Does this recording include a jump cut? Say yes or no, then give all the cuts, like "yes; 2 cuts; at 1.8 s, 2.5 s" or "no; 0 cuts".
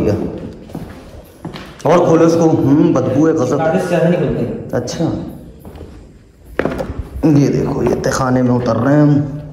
no; 0 cuts